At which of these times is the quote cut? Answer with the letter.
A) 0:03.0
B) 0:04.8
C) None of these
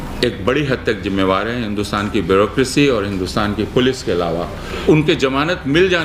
B